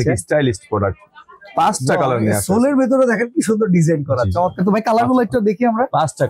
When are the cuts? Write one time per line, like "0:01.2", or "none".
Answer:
none